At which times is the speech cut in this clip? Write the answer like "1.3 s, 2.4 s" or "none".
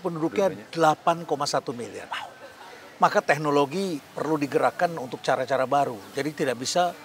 none